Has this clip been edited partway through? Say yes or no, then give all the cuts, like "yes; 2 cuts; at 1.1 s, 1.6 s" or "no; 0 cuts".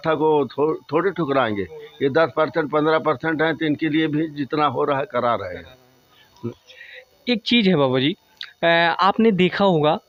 no; 0 cuts